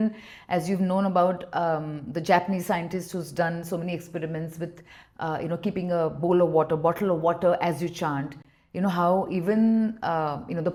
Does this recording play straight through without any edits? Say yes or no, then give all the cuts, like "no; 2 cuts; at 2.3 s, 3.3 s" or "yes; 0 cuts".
yes; 0 cuts